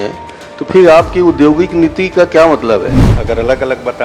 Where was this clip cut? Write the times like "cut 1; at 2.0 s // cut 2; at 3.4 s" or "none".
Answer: cut 1; at 3.0 s